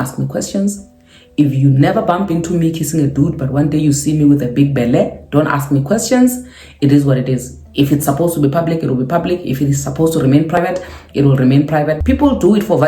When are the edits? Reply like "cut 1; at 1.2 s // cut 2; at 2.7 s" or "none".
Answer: cut 1; at 10.6 s // cut 2; at 12.0 s